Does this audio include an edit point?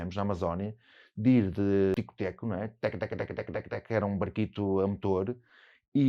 yes; 1 cut; at 2.0 s

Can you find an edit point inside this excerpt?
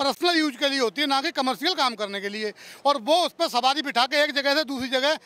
no; 0 cuts

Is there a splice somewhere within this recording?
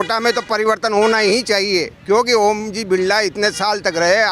no; 0 cuts

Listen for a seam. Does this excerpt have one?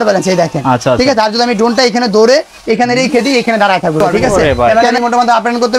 yes; 1 cut; at 4.7 s

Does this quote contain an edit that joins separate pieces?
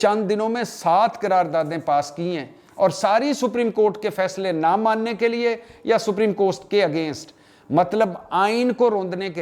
no; 0 cuts

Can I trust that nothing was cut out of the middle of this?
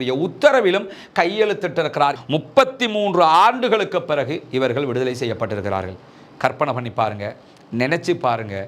no; 1 cut; at 2.2 s

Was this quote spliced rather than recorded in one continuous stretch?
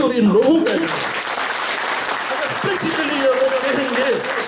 no; 0 cuts

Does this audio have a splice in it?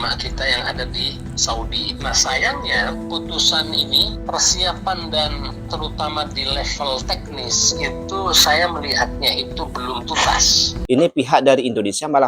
yes; 1 cut; at 10.8 s

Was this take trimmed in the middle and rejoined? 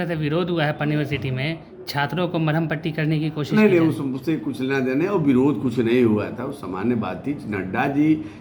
no; 0 cuts

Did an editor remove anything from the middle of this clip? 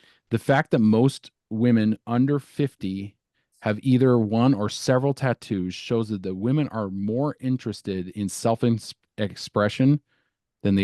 no; 0 cuts

